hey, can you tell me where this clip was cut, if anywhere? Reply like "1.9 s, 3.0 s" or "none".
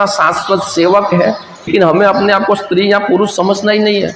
1.7 s